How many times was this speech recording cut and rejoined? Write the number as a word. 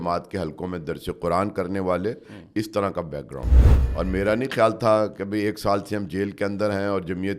one